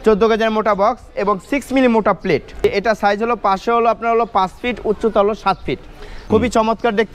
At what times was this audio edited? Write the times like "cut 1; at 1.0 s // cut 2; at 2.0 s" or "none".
cut 1; at 2.6 s // cut 2; at 6.1 s